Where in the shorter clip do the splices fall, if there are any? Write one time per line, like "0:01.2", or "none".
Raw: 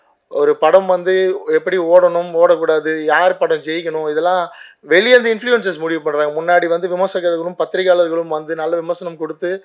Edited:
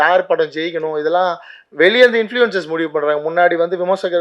none